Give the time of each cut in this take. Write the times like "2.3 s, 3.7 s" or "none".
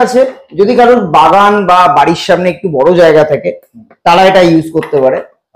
none